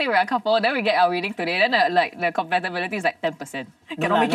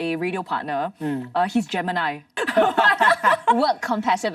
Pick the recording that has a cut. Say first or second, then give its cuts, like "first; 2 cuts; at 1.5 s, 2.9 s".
second; 1 cut; at 2.3 s